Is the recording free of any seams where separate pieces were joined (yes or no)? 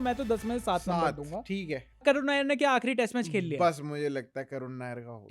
no